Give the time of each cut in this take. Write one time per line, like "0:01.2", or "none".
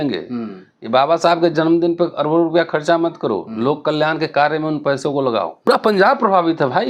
0:05.7